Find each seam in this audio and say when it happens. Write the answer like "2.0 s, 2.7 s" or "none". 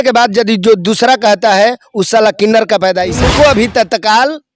3.2 s